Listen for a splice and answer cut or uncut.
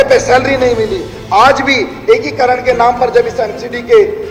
uncut